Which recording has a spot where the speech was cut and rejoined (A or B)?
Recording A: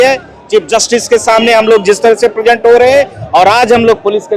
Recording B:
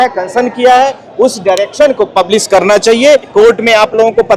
B